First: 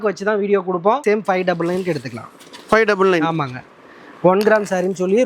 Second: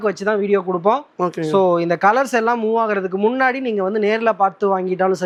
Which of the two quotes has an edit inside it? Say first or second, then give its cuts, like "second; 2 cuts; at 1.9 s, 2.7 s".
first; 1 cut; at 1.0 s